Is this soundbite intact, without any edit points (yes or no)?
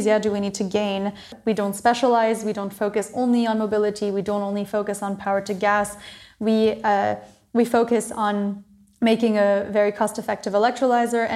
no